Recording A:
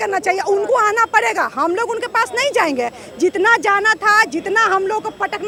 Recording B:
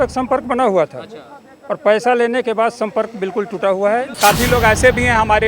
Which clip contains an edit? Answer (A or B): B